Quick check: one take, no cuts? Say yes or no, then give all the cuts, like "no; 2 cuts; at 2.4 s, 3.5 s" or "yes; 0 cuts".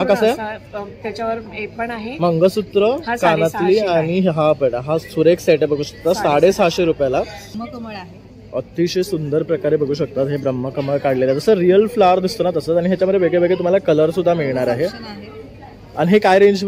no; 1 cut; at 7.4 s